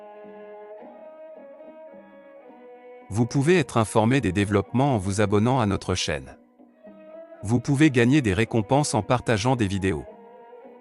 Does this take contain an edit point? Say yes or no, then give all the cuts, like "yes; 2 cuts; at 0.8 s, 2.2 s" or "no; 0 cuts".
yes; 2 cuts; at 3.1 s, 10.1 s